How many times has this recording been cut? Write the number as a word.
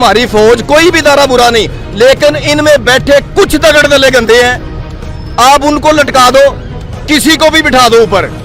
zero